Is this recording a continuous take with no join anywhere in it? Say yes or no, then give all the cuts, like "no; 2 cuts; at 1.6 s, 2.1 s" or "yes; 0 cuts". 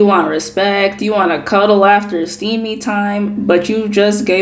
yes; 0 cuts